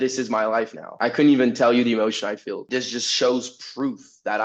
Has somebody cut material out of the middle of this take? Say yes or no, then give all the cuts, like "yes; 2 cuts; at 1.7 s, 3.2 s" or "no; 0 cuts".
yes; 1 cut; at 2.6 s